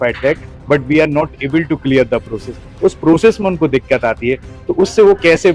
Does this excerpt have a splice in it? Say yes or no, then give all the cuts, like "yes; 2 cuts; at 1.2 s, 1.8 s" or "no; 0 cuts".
no; 0 cuts